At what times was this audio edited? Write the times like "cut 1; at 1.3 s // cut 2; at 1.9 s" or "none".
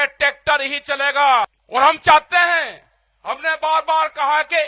cut 1; at 1.6 s

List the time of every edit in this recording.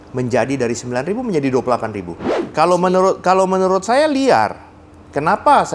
cut 1; at 2.4 s

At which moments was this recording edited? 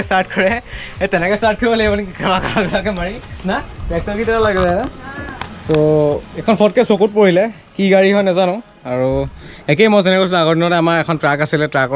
none

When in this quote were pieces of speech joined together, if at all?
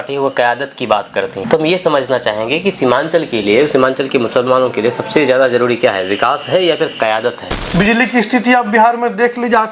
cut 1; at 1.4 s // cut 2; at 7.6 s

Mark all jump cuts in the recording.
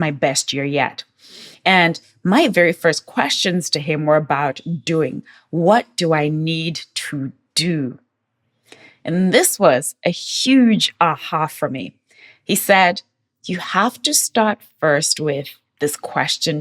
none

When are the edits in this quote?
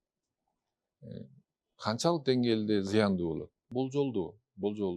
cut 1; at 3.6 s

